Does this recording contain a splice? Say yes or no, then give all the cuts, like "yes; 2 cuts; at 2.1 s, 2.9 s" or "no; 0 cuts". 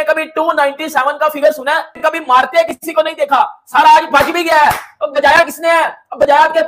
no; 0 cuts